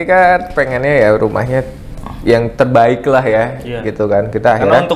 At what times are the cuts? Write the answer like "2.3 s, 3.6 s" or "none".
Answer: none